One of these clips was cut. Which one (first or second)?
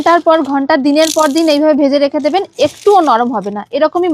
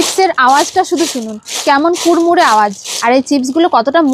second